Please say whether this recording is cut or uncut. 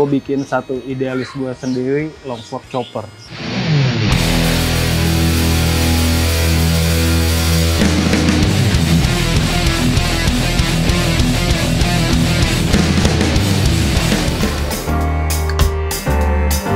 uncut